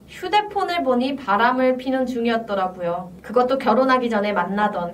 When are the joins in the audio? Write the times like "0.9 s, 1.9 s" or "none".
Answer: 3.1 s